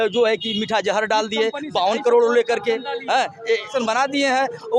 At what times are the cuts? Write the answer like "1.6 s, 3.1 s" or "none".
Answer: 3.7 s